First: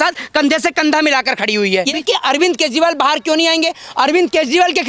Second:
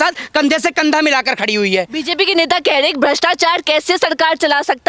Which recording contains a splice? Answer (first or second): first